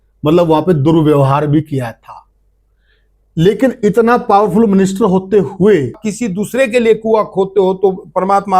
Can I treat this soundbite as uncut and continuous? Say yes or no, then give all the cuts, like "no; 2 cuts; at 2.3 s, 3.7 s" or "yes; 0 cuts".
no; 1 cut; at 6.1 s